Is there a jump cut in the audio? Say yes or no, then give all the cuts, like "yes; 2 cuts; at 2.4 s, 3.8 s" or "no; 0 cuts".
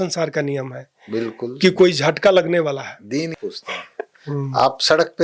yes; 1 cut; at 3.3 s